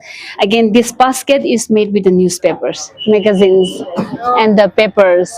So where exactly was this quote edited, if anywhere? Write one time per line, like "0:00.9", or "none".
0:02.9